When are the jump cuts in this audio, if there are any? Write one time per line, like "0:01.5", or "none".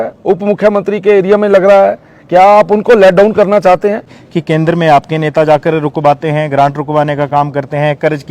0:04.2